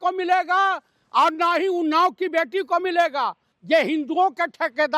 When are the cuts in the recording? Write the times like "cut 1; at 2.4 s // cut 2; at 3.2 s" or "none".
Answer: cut 1; at 3.5 s